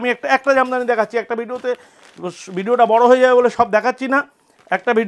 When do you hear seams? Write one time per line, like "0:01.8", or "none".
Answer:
none